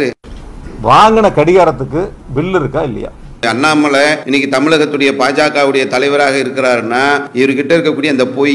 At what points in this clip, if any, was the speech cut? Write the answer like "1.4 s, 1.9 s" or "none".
3.4 s, 4.2 s, 7.3 s